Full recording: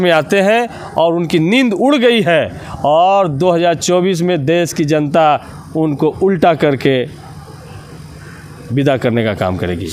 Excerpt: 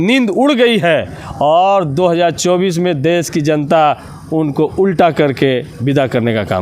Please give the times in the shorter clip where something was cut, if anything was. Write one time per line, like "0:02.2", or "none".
0:05.7

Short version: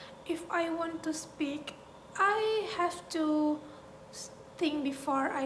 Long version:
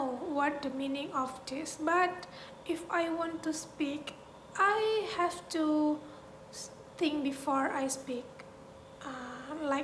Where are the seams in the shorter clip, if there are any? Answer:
none

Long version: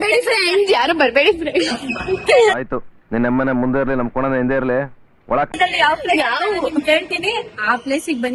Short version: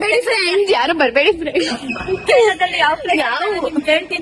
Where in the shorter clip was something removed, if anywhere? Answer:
0:02.6

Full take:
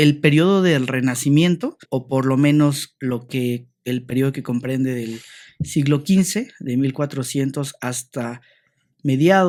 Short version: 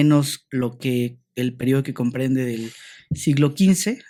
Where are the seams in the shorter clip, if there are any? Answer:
none

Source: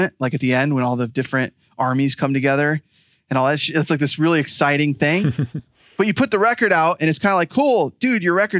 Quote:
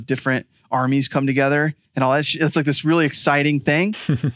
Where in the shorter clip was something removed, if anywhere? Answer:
0:01.8

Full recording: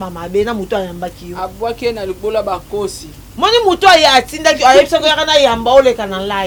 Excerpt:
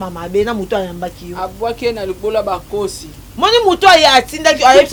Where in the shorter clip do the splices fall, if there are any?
none

